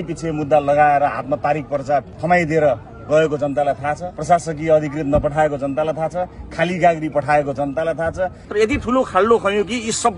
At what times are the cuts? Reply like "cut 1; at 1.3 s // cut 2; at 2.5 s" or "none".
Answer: cut 1; at 2.2 s // cut 2; at 4.1 s // cut 3; at 8.4 s